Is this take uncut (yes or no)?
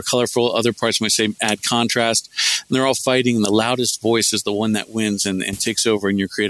yes